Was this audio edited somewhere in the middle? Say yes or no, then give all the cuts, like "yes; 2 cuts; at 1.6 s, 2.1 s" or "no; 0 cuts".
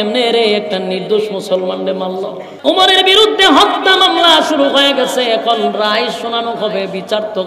yes; 1 cut; at 2.4 s